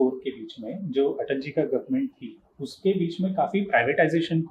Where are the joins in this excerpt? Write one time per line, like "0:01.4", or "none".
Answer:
none